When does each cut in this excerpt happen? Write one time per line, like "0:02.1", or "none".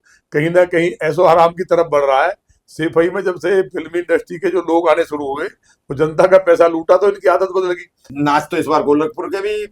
0:08.1